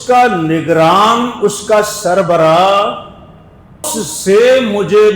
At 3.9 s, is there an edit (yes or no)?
yes